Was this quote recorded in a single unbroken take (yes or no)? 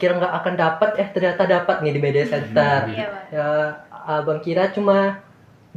yes